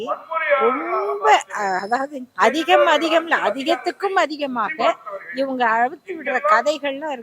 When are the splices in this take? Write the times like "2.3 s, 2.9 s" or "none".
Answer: 2.2 s